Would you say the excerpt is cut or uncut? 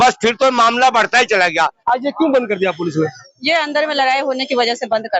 cut